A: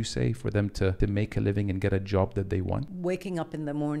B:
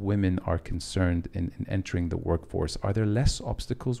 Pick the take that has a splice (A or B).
A